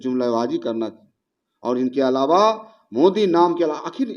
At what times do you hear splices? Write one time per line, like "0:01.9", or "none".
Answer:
none